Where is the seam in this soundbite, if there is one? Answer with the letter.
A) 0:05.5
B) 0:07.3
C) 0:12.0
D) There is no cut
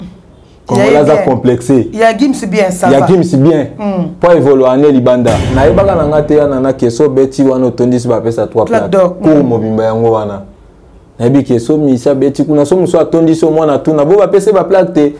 A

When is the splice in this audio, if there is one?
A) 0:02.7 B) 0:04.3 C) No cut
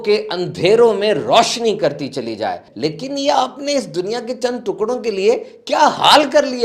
A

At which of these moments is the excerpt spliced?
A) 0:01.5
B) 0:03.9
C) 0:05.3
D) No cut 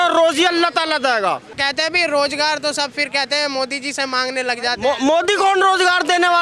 A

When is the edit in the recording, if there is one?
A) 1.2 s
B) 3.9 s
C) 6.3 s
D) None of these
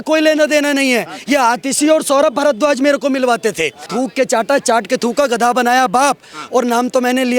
B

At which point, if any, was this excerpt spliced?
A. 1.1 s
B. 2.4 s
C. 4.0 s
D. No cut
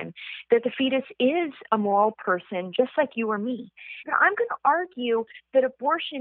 C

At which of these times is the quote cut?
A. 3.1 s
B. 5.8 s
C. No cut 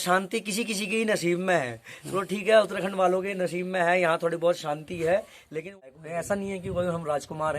B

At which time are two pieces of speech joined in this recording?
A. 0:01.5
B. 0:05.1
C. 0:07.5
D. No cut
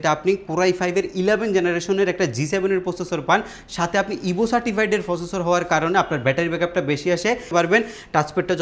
C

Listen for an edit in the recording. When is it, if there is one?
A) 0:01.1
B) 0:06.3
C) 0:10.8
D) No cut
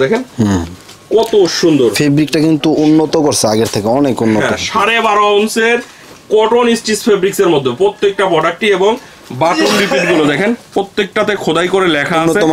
D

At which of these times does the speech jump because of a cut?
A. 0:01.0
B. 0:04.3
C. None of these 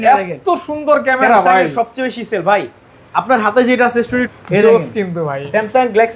B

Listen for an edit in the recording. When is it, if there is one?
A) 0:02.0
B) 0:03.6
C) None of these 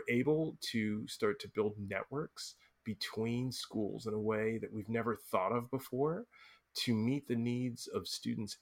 C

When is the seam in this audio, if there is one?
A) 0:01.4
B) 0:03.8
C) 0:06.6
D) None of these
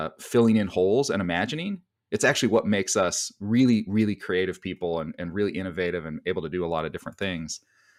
D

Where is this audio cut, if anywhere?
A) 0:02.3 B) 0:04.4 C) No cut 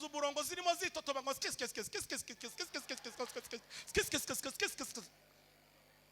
C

